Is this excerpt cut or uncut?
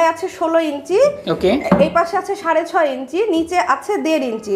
uncut